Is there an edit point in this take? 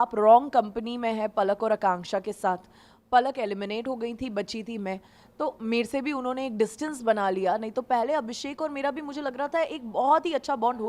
no; 0 cuts

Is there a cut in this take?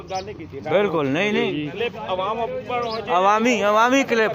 no; 0 cuts

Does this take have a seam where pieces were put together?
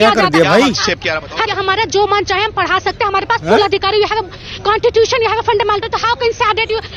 yes; 1 cut; at 1.5 s

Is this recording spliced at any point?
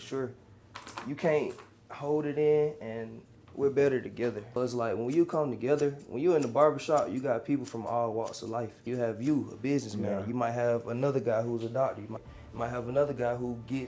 yes; 3 cuts; at 4.5 s, 8.8 s, 12.3 s

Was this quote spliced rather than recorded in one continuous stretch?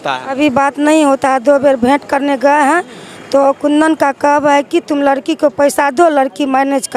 no; 0 cuts

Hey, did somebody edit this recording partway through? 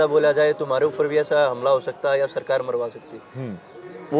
no; 0 cuts

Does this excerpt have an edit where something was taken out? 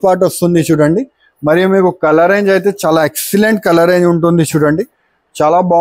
no; 0 cuts

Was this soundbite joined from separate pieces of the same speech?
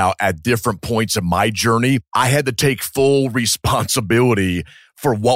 yes; 1 cut; at 2.1 s

